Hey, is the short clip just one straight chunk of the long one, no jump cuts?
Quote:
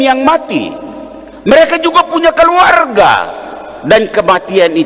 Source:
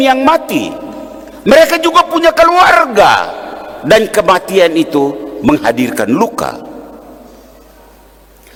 yes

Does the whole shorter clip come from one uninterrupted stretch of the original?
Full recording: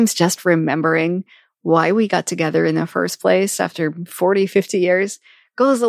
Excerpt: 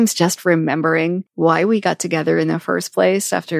no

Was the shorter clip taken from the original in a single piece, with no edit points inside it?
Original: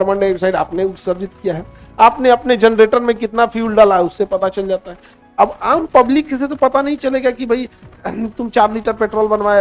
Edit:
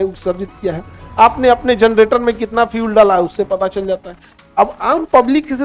yes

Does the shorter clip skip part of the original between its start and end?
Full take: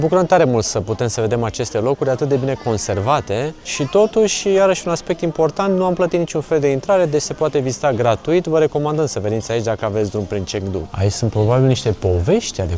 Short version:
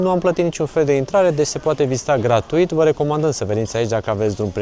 no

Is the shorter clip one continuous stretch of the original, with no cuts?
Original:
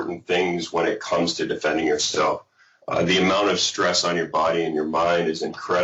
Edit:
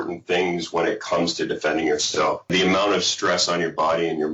no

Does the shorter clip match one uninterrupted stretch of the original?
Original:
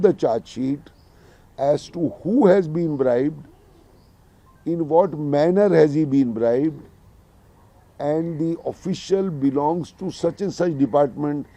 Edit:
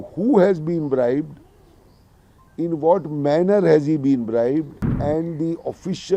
no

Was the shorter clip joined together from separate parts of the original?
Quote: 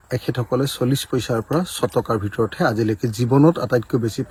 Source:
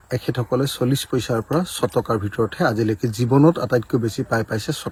no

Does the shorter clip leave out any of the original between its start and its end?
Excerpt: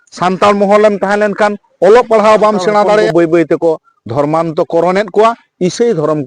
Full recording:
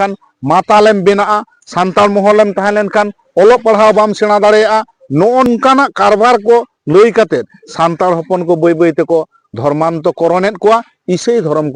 yes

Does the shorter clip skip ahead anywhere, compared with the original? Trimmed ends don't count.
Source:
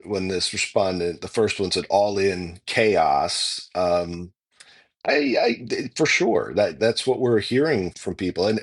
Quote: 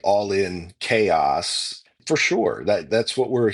yes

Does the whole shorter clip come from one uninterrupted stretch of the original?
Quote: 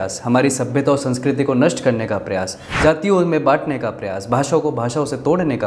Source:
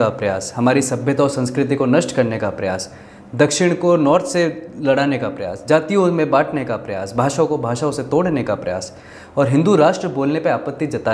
no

